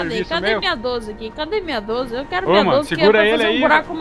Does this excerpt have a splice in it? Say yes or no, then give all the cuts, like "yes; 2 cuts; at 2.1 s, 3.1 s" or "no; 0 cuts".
no; 0 cuts